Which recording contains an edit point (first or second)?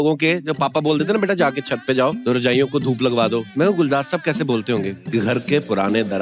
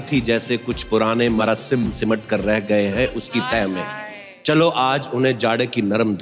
first